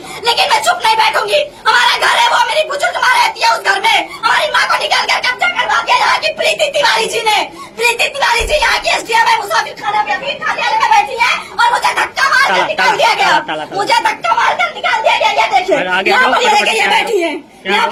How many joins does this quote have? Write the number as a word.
zero